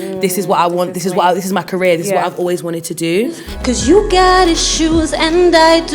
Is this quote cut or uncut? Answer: cut